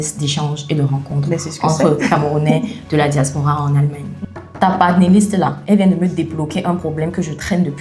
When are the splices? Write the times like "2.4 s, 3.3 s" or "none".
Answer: 4.1 s